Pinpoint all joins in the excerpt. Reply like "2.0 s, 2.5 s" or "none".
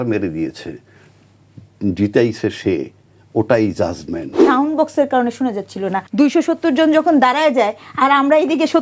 4.3 s, 6.0 s